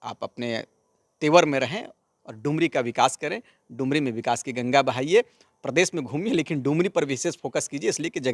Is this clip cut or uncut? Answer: uncut